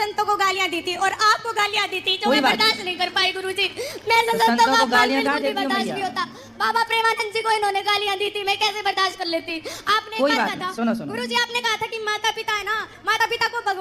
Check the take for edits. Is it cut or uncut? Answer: uncut